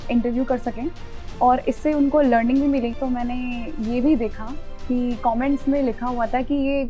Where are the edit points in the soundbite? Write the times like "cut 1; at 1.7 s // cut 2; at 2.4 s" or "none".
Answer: cut 1; at 3.0 s

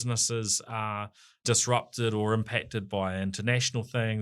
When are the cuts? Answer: cut 1; at 1.4 s

